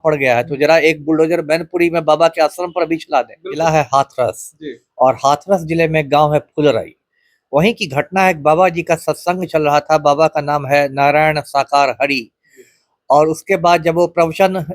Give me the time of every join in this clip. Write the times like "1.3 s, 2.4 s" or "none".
3.5 s